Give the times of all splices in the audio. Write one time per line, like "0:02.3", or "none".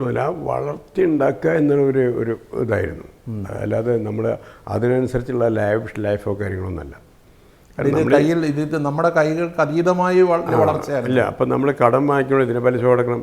none